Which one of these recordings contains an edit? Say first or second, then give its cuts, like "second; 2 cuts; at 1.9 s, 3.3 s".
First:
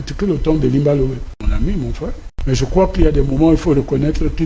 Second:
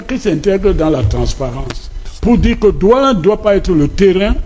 first; 2 cuts; at 1.5 s, 2.3 s